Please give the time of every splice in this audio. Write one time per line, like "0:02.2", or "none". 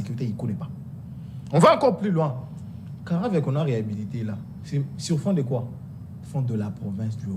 none